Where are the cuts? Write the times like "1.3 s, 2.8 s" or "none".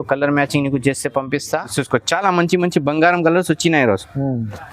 1.7 s